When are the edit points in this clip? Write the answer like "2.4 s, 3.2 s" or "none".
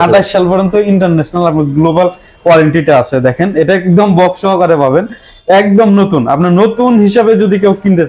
none